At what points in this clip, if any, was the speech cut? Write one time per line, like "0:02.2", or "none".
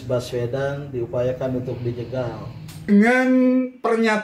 0:02.9

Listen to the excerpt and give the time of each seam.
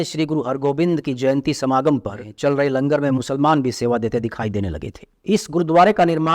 0:02.3

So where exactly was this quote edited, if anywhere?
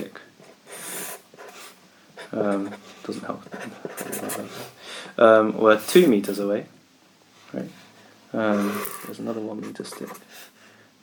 none

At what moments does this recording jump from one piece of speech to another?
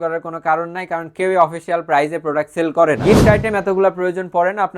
0:03.0

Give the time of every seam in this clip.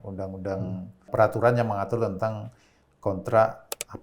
0:01.1

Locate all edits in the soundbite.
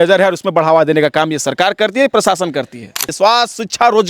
0:03.1

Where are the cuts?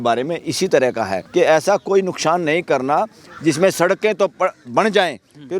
0:01.2

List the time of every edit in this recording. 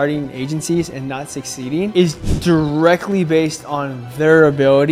none

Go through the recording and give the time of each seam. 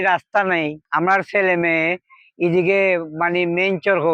none

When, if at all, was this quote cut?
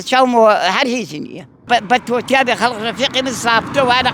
0:01.6

